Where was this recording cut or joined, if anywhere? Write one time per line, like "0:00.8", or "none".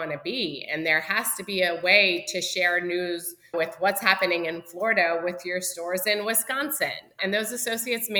0:07.2

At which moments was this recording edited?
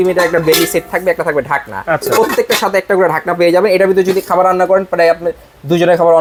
none

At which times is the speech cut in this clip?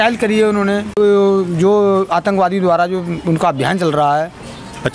0:01.0

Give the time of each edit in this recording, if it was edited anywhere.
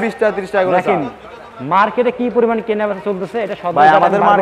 none

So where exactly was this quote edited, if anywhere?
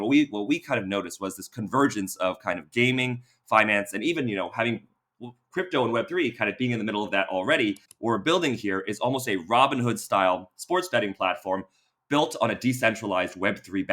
0:07.9

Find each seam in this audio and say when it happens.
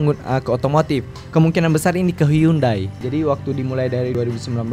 0:03.0

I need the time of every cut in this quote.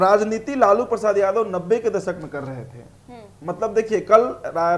none

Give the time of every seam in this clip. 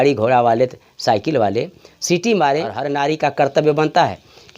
0:02.8

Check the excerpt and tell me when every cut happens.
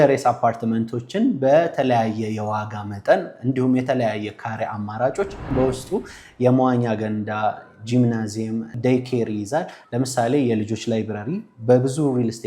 0:05.4
0:08.7
0:09.8

